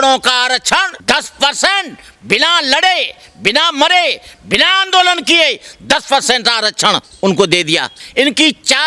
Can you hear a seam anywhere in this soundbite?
yes; 2 cuts; at 0.9 s, 8.0 s

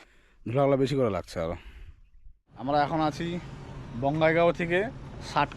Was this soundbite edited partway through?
yes; 1 cut; at 2.4 s

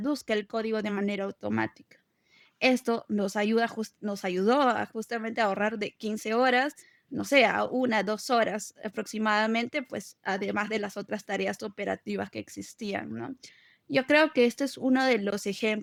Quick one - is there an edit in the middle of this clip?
no; 0 cuts

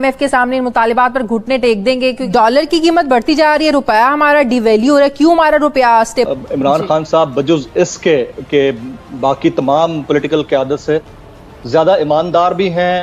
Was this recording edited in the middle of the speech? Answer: yes; 2 cuts; at 2.2 s, 6.3 s

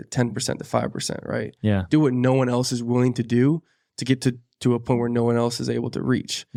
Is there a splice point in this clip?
no; 0 cuts

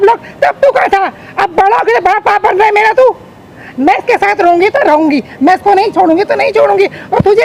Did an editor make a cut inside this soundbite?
no; 0 cuts

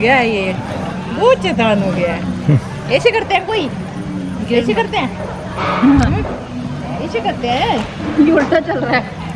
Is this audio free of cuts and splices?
yes; 0 cuts

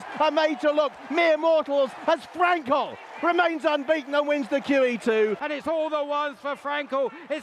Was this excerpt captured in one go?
no; 1 cut; at 5.3 s

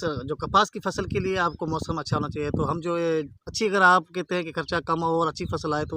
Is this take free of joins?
yes; 0 cuts

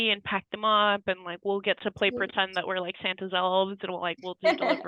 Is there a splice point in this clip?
no; 0 cuts

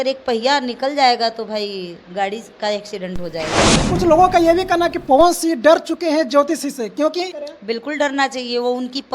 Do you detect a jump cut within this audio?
yes; 2 cuts; at 3.8 s, 7.4 s

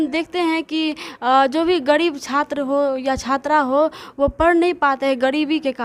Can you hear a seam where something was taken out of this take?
no; 0 cuts

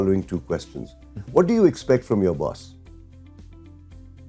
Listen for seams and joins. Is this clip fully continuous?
yes; 0 cuts

